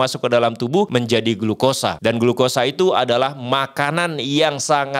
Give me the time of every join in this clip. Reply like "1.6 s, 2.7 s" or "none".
0.9 s, 2.0 s